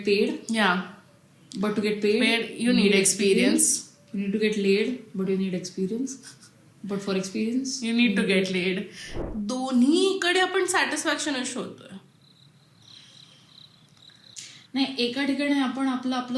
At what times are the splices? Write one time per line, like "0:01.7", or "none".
0:09.1
0:14.4

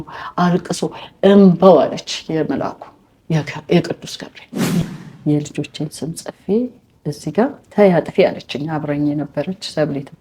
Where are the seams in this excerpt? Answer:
0:04.8

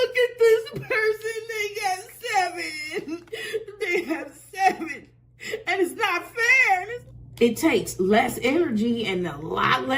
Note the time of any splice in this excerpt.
0:06.9

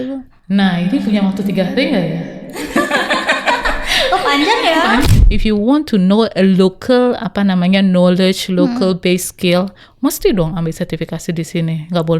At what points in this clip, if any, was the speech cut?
0:05.0

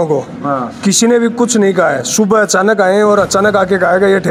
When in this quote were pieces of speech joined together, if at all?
none

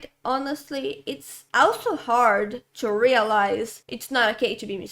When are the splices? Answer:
none

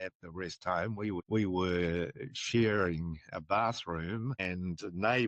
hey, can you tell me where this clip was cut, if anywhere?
none

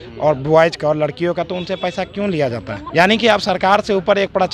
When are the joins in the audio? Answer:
0:02.8

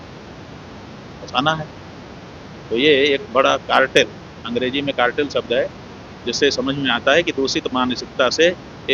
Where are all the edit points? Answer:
none

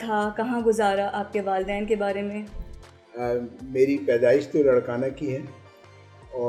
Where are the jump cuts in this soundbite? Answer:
none

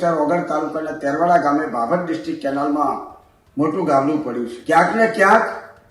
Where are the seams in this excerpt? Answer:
0:04.5

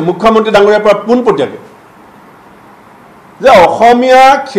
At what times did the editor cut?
none

